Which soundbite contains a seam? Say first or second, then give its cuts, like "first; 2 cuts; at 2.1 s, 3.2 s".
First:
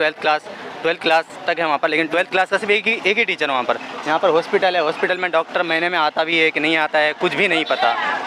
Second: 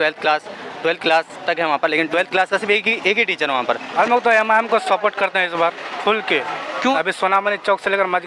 second; 2 cuts; at 3.9 s, 6.9 s